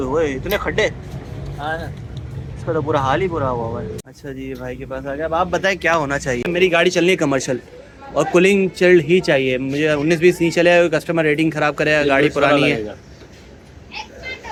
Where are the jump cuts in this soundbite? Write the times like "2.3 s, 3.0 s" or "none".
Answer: none